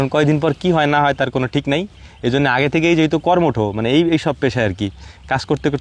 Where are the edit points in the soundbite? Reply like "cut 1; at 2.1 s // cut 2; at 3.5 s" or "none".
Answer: none